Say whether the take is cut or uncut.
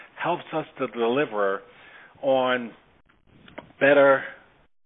uncut